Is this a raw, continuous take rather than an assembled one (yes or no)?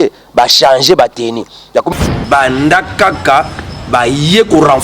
no